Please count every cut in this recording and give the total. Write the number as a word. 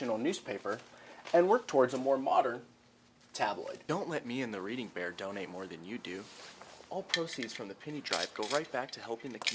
one